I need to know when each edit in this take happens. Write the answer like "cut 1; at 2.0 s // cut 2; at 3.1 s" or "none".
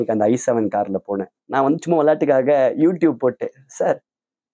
cut 1; at 1.4 s